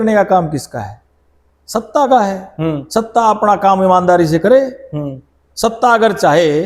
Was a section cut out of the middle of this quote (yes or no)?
no